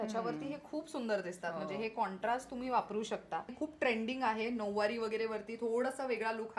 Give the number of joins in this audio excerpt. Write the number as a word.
one